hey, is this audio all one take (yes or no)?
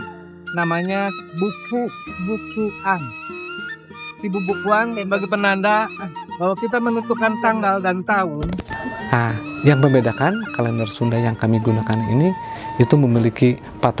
no